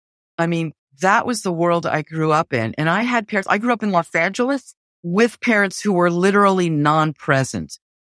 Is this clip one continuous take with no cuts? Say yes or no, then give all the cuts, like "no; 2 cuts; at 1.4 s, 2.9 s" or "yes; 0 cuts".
no; 1 cut; at 5.0 s